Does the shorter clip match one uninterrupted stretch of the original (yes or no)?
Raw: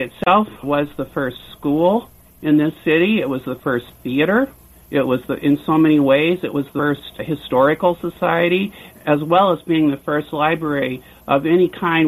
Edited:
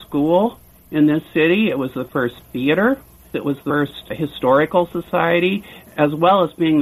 no